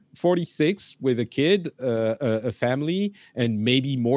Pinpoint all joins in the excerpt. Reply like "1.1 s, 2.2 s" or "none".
none